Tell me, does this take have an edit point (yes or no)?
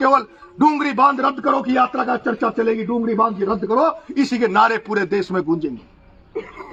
no